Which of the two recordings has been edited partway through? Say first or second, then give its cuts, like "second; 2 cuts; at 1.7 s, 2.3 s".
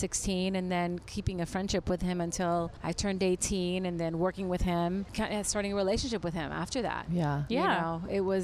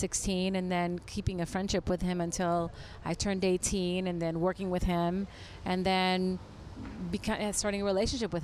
first; 2 cuts; at 2.8 s, 5.1 s